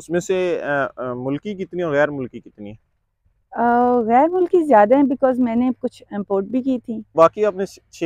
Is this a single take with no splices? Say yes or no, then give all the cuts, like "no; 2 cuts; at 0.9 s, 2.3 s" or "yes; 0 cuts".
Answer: no; 1 cut; at 7.1 s